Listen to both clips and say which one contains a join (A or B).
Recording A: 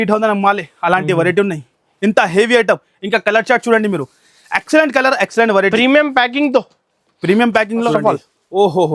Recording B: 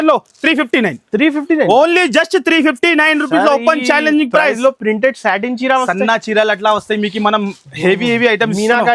A